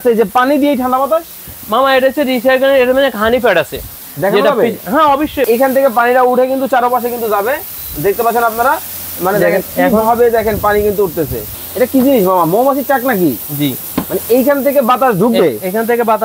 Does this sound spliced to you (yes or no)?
yes